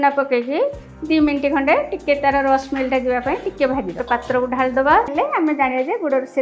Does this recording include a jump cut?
yes; 2 cuts; at 4.0 s, 5.1 s

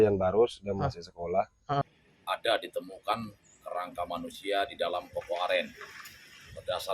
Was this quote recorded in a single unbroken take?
no; 1 cut; at 2.1 s

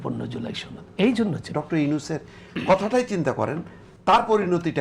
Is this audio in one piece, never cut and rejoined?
no; 1 cut; at 1.5 s

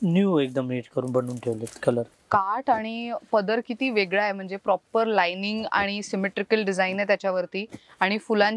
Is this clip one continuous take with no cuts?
no; 1 cut; at 2.2 s

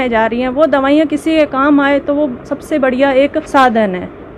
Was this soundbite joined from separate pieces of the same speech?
no; 0 cuts

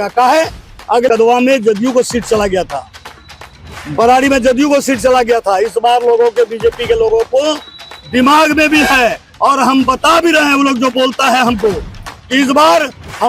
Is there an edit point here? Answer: yes; 1 cut; at 1.1 s

